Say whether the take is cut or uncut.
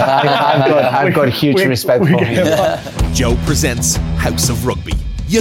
cut